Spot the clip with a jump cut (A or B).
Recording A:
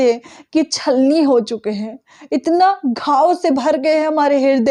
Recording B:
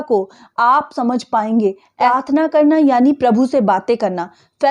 B